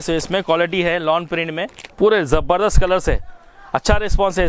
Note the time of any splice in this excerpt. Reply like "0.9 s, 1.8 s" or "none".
1.8 s